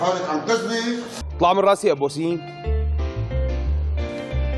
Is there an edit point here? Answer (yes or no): yes